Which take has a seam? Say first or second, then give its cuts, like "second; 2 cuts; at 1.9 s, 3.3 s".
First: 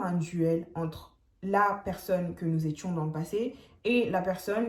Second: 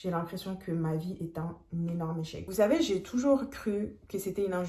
second; 1 cut; at 2.5 s